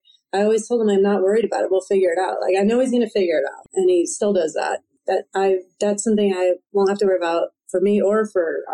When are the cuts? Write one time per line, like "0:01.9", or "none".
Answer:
0:03.6
0:04.9